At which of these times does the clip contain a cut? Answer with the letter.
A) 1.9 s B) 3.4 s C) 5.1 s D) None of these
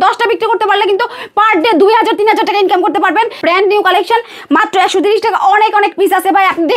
B